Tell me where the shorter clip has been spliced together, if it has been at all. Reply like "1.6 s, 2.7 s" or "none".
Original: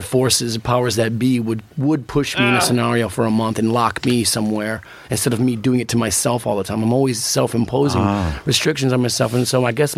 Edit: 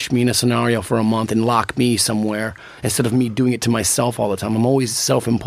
none